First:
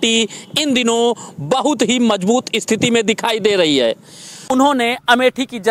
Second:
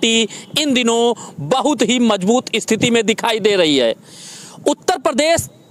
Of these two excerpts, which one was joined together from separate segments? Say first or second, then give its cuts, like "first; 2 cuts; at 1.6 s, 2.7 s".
first; 1 cut; at 4.4 s